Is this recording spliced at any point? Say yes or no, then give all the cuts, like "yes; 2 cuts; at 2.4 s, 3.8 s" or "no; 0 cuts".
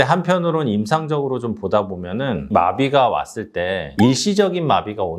no; 0 cuts